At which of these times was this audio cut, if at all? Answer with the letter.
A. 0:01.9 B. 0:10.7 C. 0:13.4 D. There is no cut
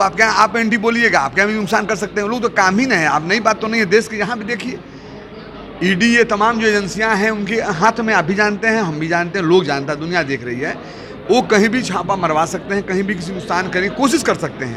D